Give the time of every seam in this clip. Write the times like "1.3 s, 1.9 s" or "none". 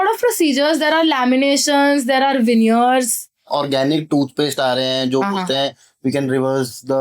3.4 s

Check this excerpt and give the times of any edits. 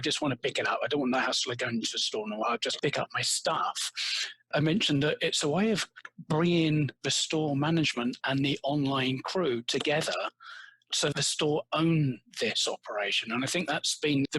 2.4 s, 4.5 s, 11.1 s

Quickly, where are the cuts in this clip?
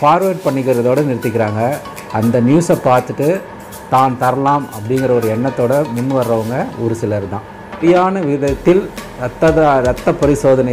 7.8 s

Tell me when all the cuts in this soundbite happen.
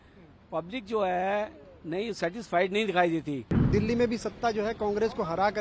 3.5 s

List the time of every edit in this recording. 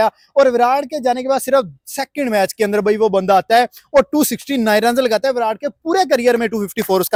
none

